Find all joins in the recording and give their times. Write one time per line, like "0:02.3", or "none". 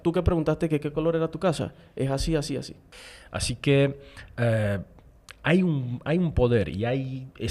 0:02.8